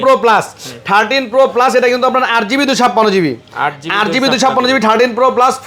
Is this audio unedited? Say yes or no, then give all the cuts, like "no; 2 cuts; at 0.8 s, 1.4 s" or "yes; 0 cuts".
yes; 0 cuts